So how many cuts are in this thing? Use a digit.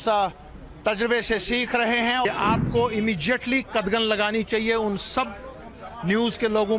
1